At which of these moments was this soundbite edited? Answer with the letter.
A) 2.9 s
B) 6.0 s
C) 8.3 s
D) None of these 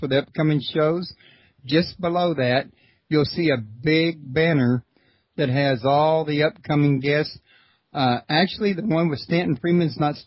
D